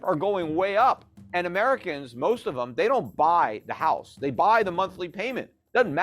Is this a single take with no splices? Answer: no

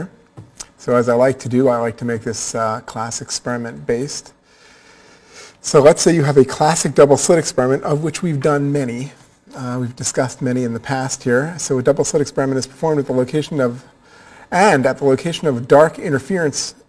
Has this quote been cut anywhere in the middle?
yes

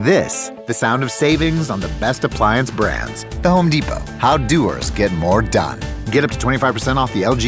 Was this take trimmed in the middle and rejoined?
no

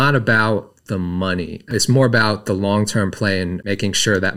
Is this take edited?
yes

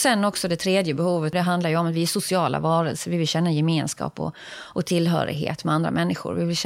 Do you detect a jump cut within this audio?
yes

